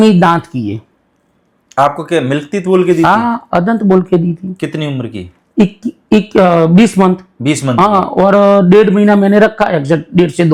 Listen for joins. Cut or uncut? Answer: uncut